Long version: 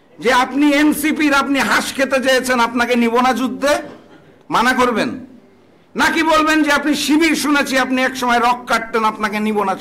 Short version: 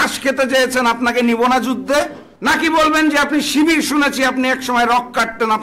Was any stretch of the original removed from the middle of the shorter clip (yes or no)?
yes